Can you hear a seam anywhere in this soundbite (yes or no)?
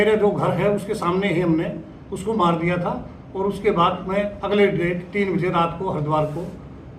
no